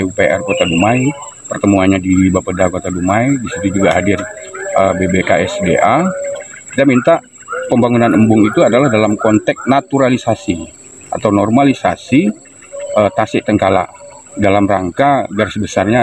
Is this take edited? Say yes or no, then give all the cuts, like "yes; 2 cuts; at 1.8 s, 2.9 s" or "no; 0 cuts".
no; 0 cuts